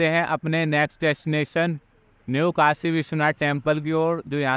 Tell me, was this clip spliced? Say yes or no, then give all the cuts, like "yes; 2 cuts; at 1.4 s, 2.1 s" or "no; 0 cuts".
no; 0 cuts